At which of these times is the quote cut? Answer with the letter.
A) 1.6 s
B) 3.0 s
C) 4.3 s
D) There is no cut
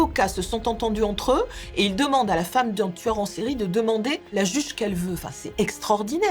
C